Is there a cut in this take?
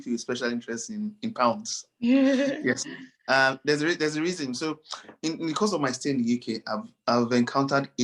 no; 0 cuts

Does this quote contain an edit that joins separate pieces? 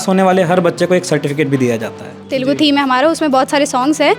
yes; 1 cut; at 2.3 s

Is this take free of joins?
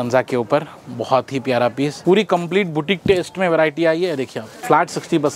no; 2 cuts; at 2.0 s, 4.5 s

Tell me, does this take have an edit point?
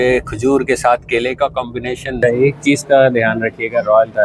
yes; 1 cut; at 2.2 s

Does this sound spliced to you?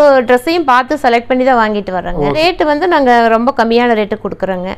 yes; 1 cut; at 2.4 s

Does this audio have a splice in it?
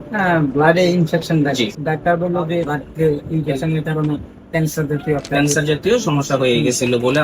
yes; 2 cuts; at 1.8 s, 2.7 s

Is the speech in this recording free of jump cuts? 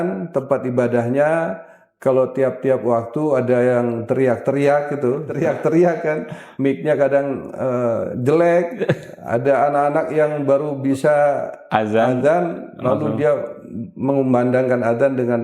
no; 1 cut; at 5.3 s

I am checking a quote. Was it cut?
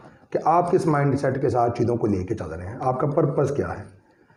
no; 0 cuts

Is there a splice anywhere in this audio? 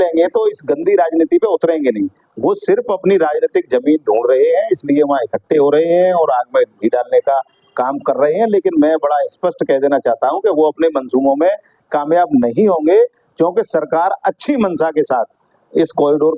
no; 0 cuts

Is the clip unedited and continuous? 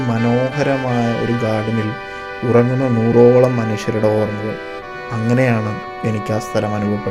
yes; 0 cuts

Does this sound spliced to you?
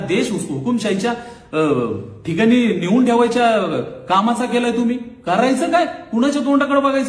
no; 0 cuts

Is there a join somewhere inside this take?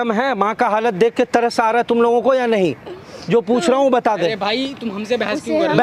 no; 0 cuts

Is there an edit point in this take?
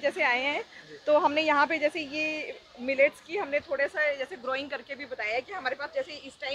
no; 0 cuts

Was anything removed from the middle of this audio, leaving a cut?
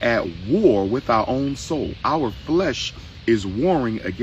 no; 0 cuts

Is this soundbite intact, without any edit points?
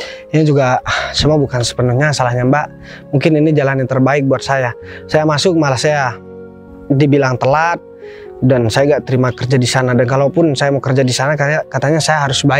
yes; 0 cuts

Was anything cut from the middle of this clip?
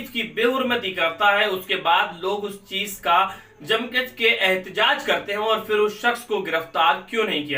no; 0 cuts

